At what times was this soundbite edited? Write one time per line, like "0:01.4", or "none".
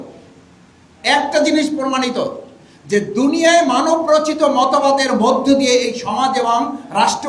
none